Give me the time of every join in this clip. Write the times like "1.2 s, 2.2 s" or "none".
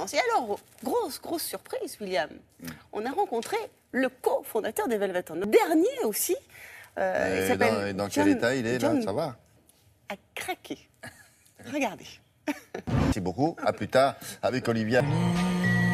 12.0 s